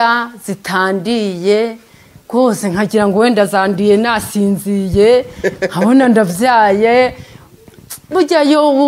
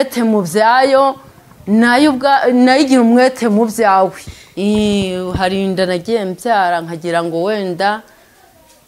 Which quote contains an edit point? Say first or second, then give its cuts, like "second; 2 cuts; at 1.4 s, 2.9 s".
second; 1 cut; at 4.2 s